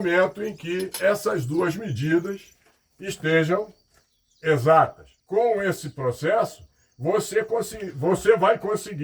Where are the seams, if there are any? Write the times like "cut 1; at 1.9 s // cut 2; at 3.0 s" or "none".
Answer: cut 1; at 5.1 s